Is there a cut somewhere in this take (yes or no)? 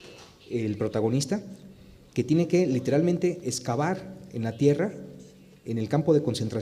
no